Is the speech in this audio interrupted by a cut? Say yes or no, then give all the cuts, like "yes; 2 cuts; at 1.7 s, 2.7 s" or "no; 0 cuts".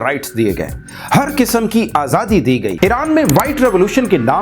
yes; 1 cut; at 2.7 s